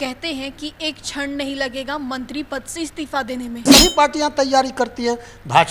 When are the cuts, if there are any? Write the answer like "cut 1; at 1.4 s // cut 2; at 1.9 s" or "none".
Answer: cut 1; at 3.6 s